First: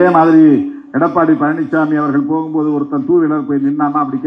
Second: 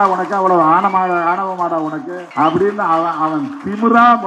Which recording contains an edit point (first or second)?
second